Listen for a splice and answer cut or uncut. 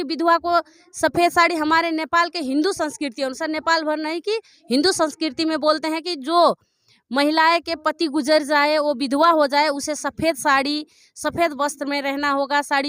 uncut